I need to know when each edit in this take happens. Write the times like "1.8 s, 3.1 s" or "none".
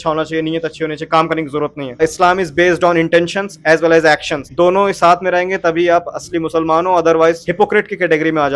none